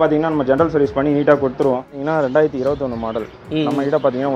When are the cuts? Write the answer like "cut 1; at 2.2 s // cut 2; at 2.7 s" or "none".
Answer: cut 1; at 2.0 s